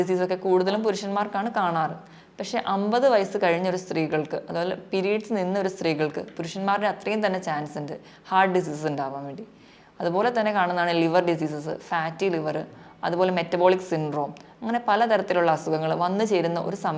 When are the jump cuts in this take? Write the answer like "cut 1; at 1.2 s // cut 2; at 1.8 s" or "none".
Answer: none